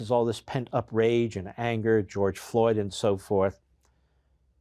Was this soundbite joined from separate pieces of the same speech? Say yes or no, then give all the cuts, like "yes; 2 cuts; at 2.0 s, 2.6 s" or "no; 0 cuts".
no; 0 cuts